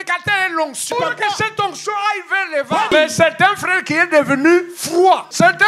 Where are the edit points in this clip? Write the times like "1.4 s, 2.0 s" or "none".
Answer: 0.9 s, 2.9 s, 5.0 s